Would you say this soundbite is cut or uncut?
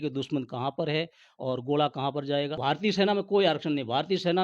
cut